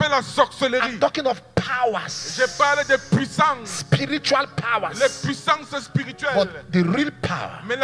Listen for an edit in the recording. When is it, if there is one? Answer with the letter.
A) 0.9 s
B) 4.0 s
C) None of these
C